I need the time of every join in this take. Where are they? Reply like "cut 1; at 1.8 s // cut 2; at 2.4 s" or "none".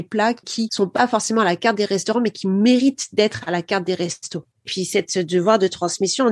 cut 1; at 4.7 s